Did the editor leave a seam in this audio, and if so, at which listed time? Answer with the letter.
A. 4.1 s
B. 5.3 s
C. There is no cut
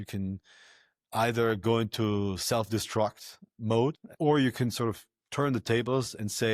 A